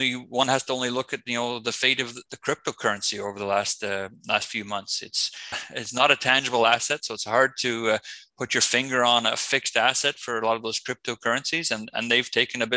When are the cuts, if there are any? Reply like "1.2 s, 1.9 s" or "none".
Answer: 5.7 s